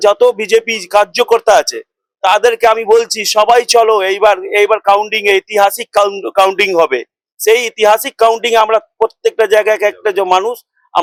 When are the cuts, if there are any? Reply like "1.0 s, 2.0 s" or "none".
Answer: none